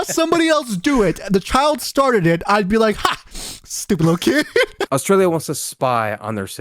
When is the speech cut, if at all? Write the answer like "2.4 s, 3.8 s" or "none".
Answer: 4.9 s